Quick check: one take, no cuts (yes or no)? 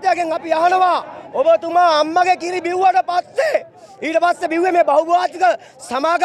yes